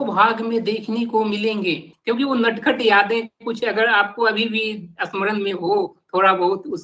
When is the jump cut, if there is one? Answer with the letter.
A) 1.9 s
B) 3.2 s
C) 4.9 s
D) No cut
A